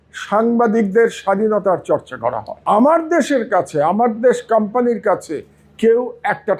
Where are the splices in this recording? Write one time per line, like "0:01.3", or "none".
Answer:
0:02.5

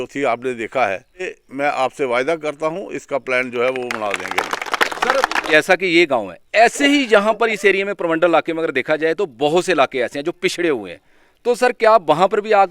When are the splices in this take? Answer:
0:01.4
0:05.5

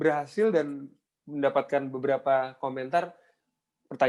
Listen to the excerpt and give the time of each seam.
none

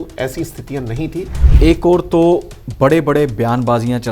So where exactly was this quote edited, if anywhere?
0:01.4

